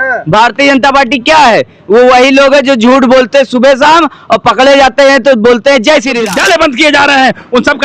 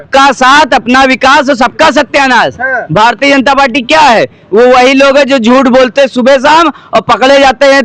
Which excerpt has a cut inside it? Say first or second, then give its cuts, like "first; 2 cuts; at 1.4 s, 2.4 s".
first; 1 cut; at 6.2 s